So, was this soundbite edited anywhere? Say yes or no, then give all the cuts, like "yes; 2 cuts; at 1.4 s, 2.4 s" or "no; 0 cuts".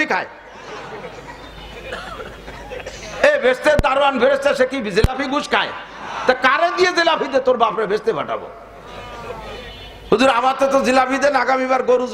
no; 0 cuts